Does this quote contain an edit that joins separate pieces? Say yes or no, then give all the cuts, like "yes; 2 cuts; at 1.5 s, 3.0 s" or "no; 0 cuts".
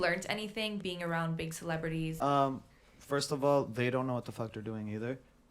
yes; 1 cut; at 2.1 s